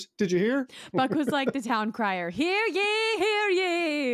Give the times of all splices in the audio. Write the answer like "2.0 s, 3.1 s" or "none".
1.0 s